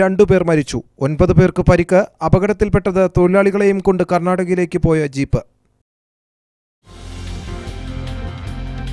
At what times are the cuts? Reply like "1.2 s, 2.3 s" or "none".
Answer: none